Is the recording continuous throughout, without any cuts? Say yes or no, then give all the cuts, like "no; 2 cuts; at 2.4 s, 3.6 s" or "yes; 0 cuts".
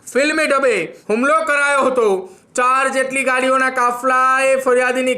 no; 2 cuts; at 0.9 s, 2.4 s